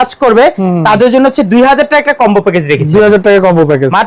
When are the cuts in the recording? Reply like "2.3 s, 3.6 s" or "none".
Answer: none